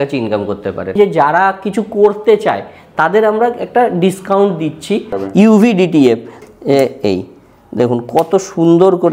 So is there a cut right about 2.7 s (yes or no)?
no